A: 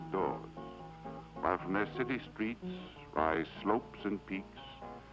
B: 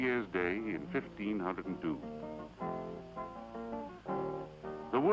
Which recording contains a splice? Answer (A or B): B